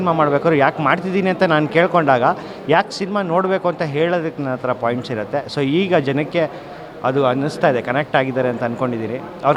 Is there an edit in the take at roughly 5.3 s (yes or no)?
no